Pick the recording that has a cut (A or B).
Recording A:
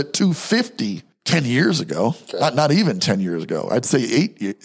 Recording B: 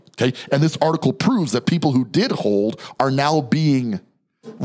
A